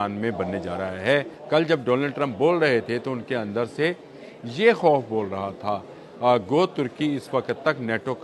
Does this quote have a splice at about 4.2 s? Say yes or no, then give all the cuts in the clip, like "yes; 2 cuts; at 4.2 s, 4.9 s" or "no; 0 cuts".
no; 1 cut; at 1.4 s